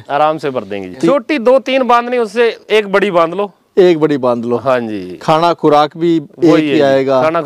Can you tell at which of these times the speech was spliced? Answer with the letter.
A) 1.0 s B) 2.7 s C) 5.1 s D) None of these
A